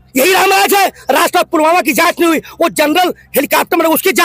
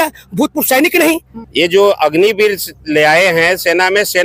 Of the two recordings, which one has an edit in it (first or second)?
second